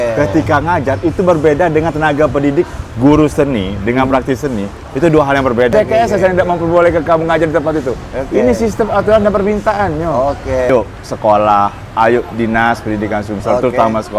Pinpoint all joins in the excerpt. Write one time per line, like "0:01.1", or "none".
0:05.7
0:10.7